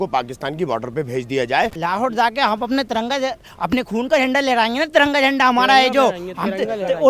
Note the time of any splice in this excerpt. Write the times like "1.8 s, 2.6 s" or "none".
1.8 s